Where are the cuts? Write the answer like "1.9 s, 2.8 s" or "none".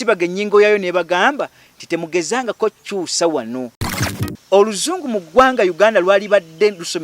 3.8 s